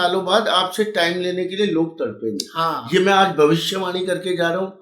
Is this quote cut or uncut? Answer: uncut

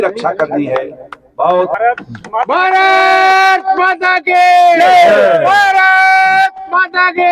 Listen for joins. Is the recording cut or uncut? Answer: cut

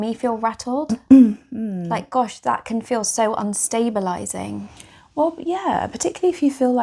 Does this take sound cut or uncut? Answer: uncut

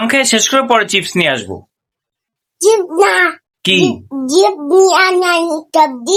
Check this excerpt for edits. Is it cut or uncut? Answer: uncut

